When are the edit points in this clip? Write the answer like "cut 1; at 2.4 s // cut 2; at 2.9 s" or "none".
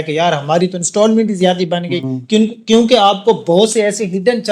none